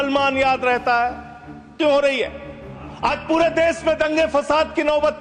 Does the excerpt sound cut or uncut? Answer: cut